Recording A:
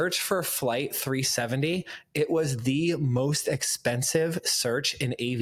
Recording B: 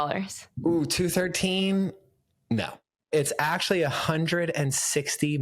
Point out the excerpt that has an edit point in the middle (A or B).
B